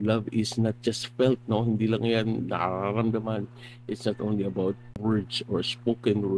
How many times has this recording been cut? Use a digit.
1